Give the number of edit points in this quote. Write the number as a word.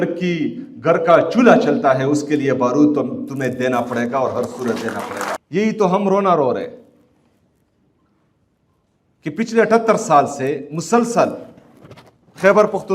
one